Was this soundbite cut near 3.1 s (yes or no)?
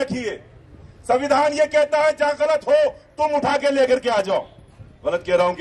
no